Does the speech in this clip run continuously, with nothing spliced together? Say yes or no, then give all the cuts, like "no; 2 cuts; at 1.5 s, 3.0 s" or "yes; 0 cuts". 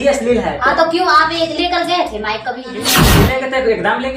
no; 1 cut; at 3.1 s